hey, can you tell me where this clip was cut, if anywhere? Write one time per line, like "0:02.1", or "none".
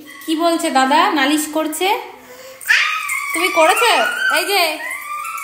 none